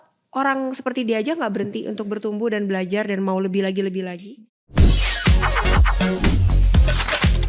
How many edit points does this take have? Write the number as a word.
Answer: one